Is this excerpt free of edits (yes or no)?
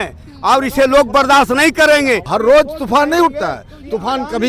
no